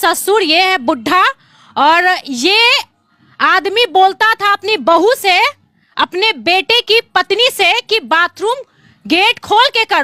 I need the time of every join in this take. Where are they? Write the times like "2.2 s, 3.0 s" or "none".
none